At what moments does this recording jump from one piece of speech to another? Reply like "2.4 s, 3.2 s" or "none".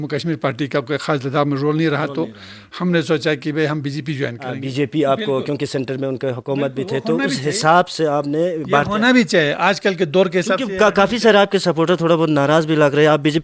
4.5 s